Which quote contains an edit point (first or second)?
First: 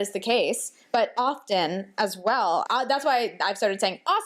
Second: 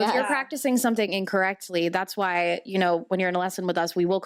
first